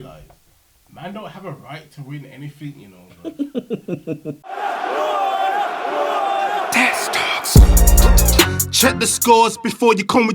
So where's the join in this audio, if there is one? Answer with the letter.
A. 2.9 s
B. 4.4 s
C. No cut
B